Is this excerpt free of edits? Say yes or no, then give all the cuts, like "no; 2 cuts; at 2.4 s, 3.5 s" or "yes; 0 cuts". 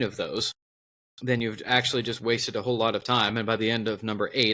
no; 1 cut; at 1.2 s